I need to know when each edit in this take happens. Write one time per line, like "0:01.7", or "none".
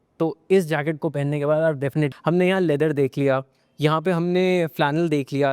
0:02.1